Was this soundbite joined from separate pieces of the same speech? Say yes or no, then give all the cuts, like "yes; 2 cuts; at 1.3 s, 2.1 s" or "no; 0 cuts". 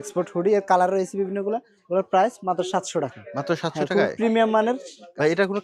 no; 0 cuts